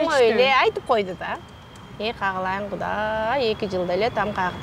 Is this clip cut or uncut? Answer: uncut